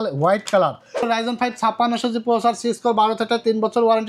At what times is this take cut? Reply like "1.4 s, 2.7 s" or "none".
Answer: 1.0 s

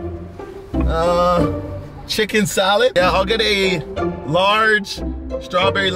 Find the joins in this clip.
2.9 s

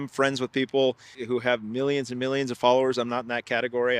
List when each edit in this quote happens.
1.1 s

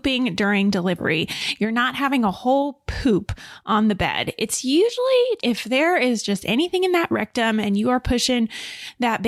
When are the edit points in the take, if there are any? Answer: none

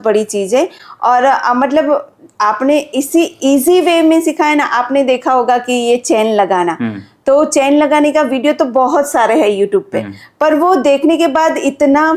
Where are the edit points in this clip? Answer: none

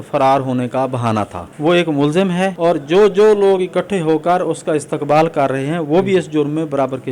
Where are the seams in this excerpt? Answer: 1.4 s, 2.5 s

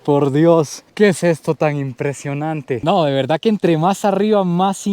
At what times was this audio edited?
2.8 s

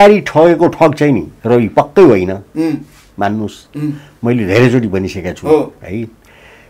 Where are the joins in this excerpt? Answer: none

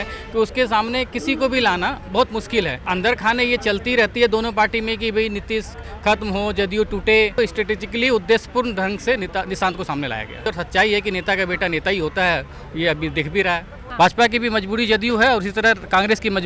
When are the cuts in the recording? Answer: 2.8 s, 7.3 s, 10.5 s, 13.8 s

